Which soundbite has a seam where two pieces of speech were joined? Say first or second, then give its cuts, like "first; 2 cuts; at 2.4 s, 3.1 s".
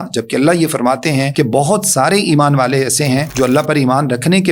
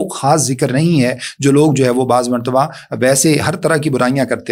first; 2 cuts; at 1.3 s, 3.3 s